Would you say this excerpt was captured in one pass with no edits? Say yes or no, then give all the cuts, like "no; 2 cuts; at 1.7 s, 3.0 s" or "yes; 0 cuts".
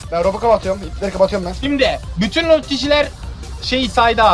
yes; 0 cuts